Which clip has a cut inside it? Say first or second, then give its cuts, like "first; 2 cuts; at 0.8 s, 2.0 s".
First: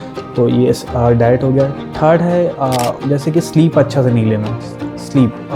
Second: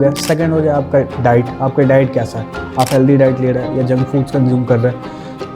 first; 1 cut; at 3.0 s